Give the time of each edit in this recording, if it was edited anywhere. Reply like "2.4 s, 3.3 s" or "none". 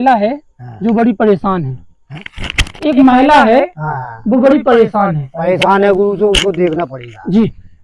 none